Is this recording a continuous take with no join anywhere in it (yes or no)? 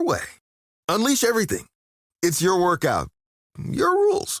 yes